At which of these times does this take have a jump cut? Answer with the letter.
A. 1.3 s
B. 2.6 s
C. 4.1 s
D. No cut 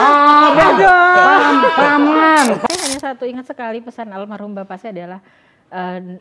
B